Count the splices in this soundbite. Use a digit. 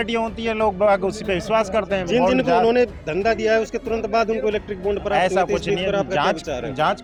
0